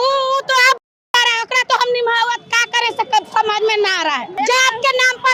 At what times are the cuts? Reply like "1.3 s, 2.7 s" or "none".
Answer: none